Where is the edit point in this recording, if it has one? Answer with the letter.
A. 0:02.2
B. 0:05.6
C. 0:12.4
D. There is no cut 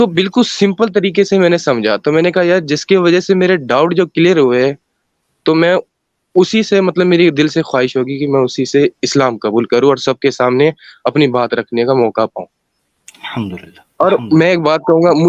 D